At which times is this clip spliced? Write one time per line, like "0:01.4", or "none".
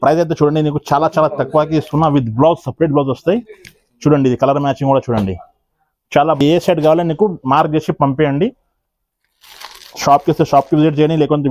0:06.4